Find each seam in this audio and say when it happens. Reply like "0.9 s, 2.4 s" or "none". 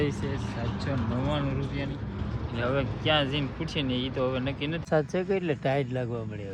4.8 s